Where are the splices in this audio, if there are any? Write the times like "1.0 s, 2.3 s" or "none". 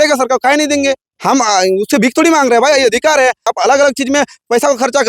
1.1 s, 3.5 s